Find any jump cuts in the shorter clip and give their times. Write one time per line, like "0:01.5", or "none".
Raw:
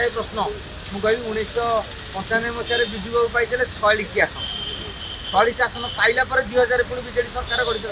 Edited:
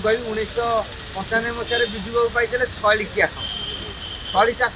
none